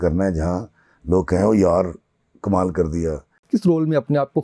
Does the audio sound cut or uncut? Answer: cut